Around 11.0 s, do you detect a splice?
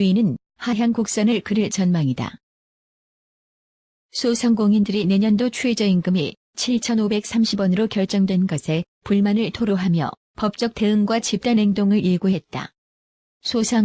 no; 1 cut; at 1.1 s

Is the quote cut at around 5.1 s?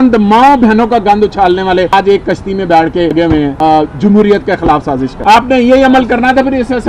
yes; 3 cuts; at 1.9 s, 3.3 s, 5.1 s

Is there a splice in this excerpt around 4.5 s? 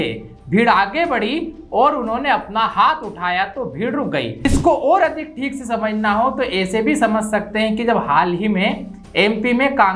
yes; 1 cut; at 4.5 s

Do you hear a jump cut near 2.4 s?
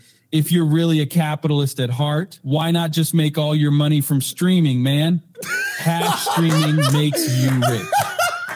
yes; 1 cut; at 2.4 s

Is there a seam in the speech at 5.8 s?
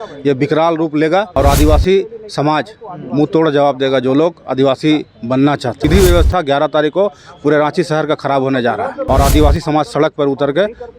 yes; 3 cuts; at 1.3 s, 5.8 s, 9.0 s

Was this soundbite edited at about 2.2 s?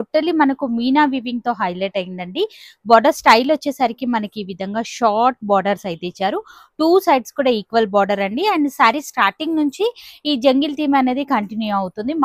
no; 0 cuts

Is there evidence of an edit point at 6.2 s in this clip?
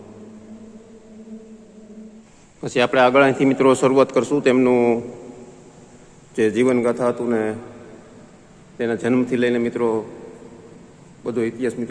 no; 1 cut; at 2.2 s

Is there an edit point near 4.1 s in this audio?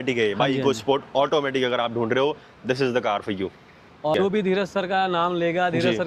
yes; 1 cut; at 4.1 s

